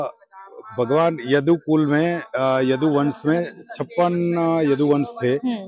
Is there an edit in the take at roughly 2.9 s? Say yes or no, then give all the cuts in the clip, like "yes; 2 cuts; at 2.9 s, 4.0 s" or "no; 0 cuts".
no; 0 cuts